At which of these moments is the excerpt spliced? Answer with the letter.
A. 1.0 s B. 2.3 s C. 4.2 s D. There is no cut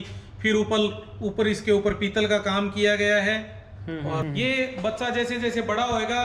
C